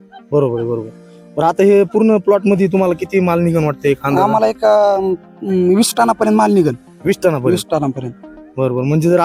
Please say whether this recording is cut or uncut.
uncut